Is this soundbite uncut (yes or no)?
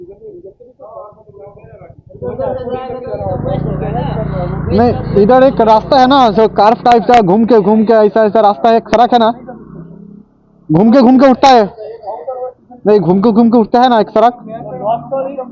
yes